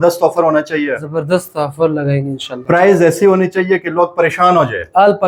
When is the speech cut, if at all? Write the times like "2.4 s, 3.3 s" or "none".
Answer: none